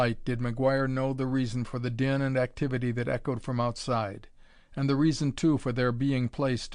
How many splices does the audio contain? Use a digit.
1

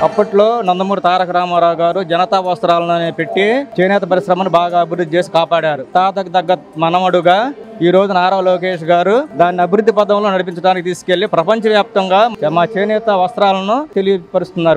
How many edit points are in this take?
3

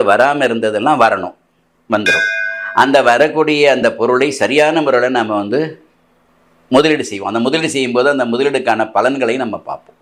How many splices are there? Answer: 0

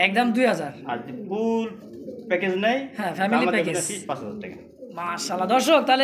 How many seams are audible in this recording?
0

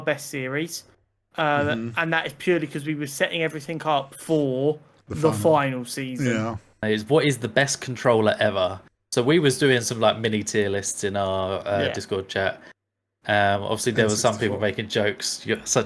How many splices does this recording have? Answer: 1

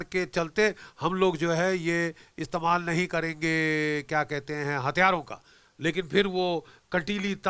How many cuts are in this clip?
0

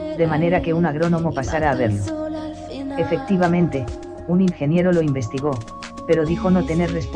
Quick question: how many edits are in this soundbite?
1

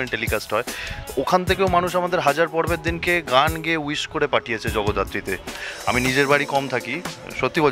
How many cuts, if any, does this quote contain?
1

